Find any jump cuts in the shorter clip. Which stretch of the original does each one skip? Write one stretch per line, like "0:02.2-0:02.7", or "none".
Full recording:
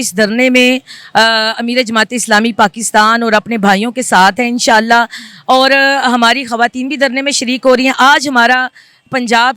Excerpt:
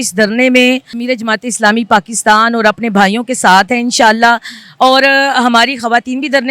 0:00.9-0:01.6